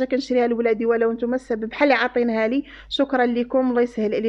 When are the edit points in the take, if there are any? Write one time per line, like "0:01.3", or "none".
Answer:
none